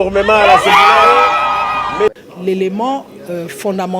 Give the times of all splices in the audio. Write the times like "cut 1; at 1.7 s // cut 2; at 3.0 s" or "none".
cut 1; at 2.1 s